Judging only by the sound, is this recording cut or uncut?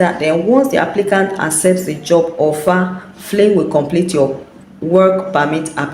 uncut